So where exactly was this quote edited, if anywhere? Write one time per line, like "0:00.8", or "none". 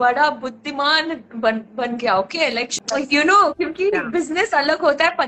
0:02.7